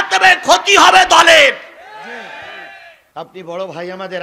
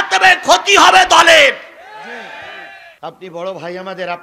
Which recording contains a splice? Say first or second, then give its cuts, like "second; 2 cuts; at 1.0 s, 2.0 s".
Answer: second; 1 cut; at 2.8 s